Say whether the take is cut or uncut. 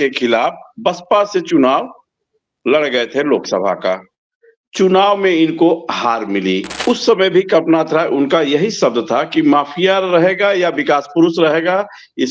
cut